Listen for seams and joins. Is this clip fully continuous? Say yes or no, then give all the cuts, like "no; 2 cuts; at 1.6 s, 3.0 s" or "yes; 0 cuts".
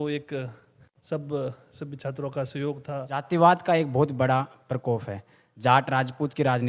no; 1 cut; at 3.2 s